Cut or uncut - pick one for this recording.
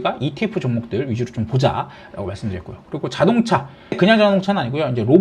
cut